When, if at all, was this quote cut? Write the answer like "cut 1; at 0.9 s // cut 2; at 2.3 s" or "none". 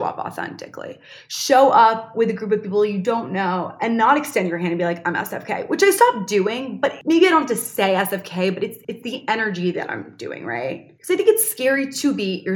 cut 1; at 10.9 s